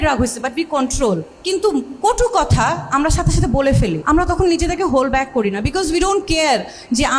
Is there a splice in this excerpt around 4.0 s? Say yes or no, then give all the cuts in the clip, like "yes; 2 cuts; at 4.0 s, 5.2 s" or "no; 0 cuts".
yes; 2 cuts; at 1.3 s, 4.0 s